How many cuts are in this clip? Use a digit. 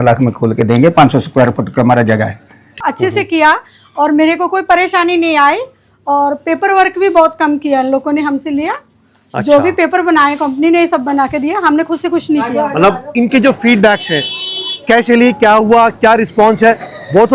2